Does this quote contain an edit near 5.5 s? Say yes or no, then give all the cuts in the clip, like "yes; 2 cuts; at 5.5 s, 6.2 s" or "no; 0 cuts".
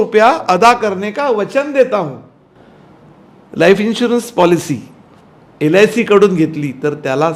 no; 0 cuts